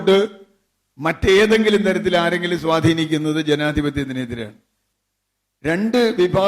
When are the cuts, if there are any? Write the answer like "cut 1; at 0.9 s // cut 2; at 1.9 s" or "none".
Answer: cut 1; at 4.8 s